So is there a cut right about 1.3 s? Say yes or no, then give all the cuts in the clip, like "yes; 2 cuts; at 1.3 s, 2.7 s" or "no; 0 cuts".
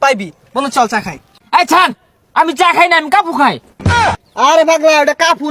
yes; 2 cuts; at 1.3 s, 4.1 s